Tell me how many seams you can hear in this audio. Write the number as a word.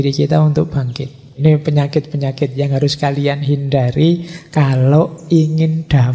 one